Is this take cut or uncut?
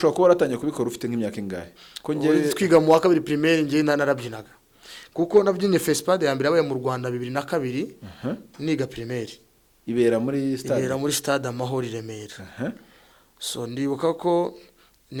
uncut